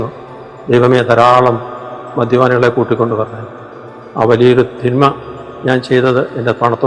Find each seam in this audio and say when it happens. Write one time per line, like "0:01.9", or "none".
none